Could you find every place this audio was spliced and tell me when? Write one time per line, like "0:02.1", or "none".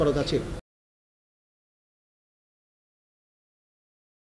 none